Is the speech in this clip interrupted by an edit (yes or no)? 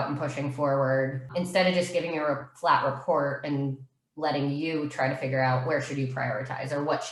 yes